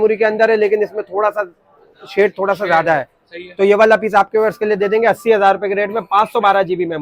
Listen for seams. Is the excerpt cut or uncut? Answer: uncut